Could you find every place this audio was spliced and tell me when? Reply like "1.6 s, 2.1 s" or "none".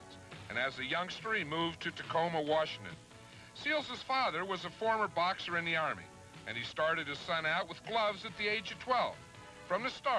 6.6 s